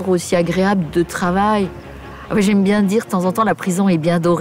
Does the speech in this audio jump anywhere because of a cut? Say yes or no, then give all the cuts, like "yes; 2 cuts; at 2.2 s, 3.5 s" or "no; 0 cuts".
no; 0 cuts